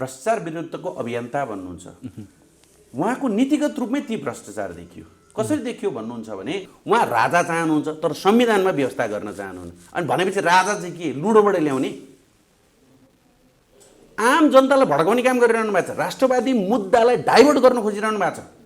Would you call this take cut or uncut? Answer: cut